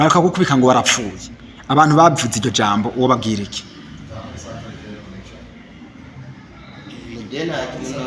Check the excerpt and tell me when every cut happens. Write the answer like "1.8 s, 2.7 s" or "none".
none